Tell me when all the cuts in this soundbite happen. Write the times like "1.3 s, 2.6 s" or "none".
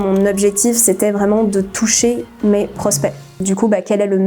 3.4 s